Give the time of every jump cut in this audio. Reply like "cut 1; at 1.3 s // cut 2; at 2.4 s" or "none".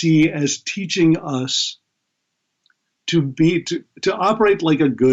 none